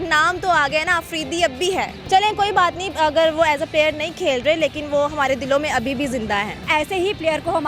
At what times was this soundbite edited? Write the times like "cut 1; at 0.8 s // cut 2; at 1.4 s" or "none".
none